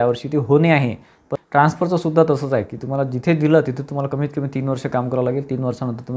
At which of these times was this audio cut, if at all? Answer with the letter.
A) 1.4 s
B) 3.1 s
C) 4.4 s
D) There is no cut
A